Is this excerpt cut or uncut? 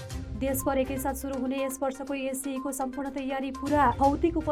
uncut